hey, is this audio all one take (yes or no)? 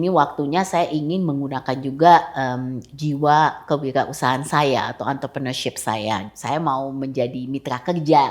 no